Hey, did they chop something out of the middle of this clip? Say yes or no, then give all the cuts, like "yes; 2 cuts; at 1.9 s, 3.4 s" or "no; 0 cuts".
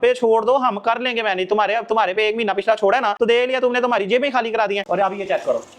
yes; 1 cut; at 4.9 s